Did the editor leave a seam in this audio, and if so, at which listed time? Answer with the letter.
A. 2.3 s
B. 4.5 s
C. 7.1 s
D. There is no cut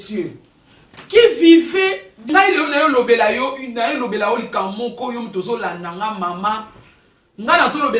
A